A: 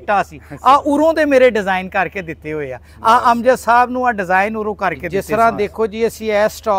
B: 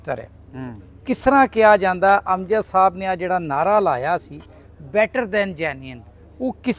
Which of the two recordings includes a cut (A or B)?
A